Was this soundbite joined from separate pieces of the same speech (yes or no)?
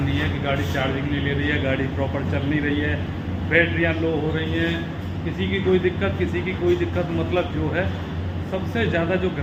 no